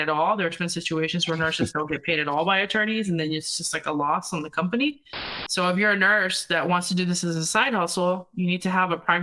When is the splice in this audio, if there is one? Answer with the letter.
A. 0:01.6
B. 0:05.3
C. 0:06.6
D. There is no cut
B